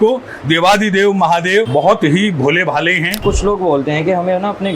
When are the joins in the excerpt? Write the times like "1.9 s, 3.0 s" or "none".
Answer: 1.7 s, 3.2 s